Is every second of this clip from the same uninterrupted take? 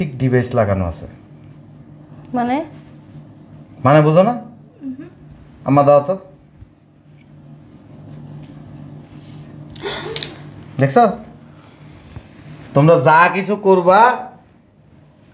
yes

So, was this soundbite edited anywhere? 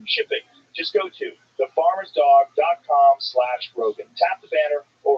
yes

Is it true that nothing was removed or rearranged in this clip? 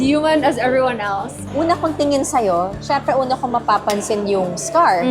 no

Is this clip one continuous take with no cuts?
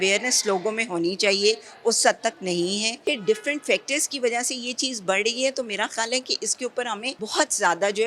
no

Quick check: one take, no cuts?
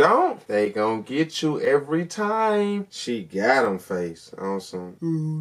no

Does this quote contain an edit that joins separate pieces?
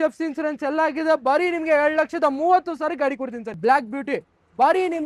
yes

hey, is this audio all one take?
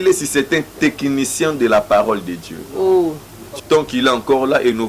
no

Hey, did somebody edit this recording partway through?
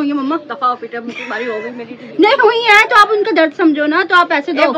no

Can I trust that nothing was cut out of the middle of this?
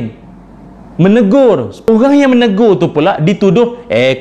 no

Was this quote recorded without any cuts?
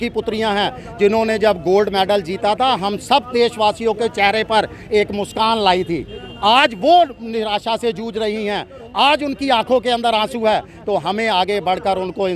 yes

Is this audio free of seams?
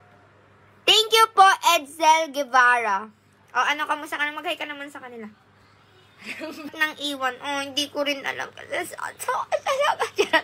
no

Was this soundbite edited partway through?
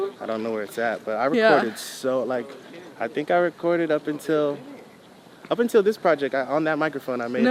no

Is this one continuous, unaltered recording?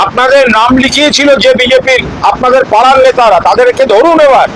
yes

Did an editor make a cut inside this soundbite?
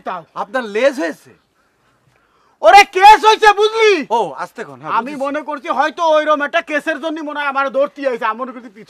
no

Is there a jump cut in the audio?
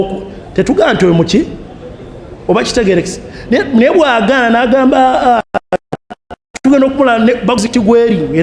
no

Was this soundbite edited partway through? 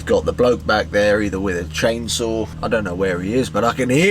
yes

